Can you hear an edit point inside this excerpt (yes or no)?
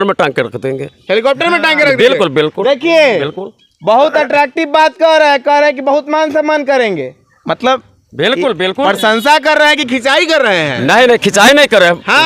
no